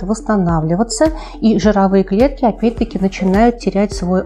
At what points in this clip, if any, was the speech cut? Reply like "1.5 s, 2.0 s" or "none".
none

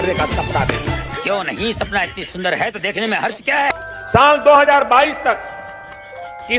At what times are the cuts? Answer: 3.8 s

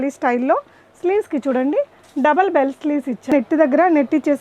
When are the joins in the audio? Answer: 3.3 s

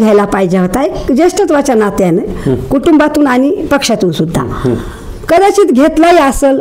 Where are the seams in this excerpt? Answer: none

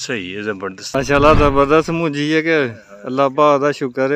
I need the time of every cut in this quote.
0.9 s

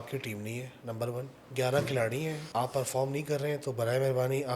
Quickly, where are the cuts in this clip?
1.4 s, 2.4 s

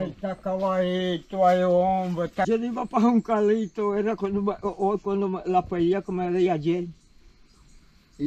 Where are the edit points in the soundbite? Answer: 2.5 s

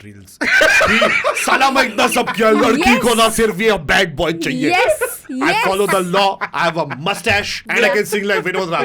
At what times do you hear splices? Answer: 7.6 s

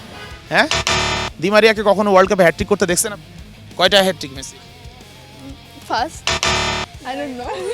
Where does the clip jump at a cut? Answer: none

